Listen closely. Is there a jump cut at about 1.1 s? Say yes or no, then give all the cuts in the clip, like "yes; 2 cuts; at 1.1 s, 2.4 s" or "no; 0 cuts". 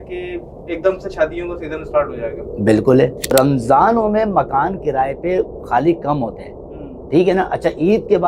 no; 1 cut; at 3.2 s